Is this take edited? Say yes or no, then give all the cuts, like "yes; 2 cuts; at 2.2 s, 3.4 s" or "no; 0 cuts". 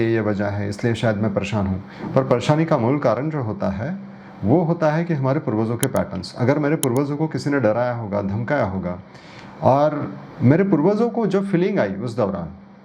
no; 0 cuts